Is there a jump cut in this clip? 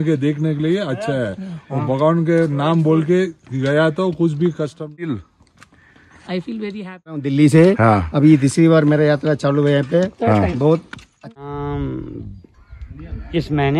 yes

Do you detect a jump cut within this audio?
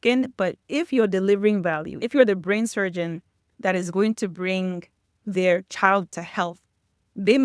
yes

